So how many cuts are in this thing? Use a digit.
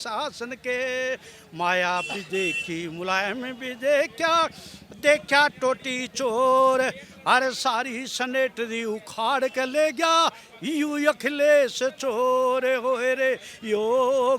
0